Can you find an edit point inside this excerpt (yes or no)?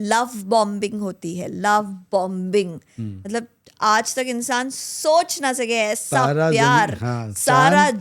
no